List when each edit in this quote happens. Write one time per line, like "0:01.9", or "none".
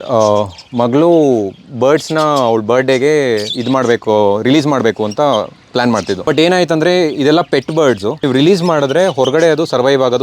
0:06.3
0:08.2